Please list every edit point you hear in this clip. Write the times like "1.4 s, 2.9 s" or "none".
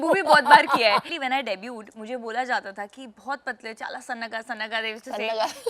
1.1 s